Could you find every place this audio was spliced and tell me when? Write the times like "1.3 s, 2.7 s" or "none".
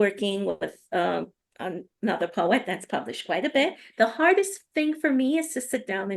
3.8 s